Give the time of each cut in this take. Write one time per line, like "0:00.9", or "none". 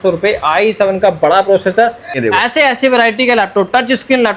0:02.2